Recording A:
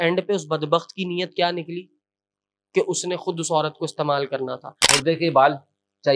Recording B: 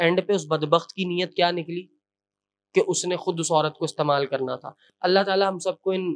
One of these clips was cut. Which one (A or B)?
A